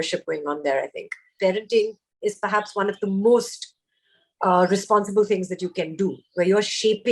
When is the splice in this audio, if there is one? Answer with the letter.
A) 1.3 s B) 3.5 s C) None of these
A